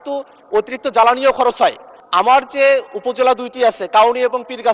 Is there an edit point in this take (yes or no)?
yes